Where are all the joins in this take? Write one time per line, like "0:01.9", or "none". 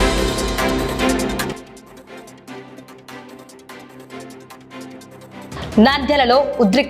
0:01.1